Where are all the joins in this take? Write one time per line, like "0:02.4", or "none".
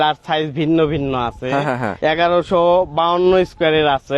0:01.9